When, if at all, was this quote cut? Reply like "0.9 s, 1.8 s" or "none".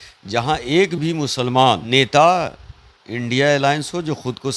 1.8 s